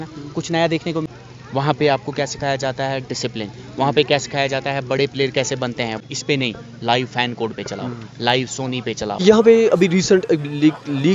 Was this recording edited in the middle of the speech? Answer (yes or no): yes